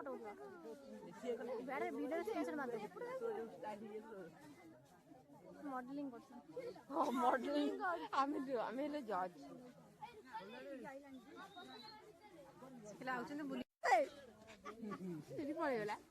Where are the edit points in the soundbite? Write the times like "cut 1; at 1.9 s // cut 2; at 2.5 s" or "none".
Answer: cut 1; at 13.7 s